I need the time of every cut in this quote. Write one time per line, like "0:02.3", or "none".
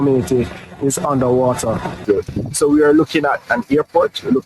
0:02.0